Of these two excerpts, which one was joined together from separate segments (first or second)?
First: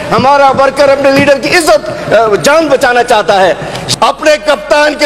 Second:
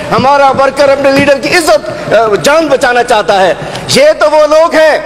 first